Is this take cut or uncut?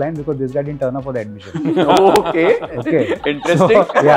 uncut